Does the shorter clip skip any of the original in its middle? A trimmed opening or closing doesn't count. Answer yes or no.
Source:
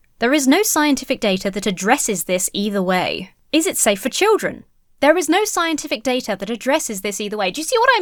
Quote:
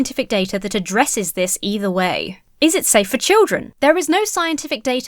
yes